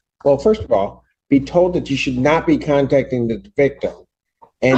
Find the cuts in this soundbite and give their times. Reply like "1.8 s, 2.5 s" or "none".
none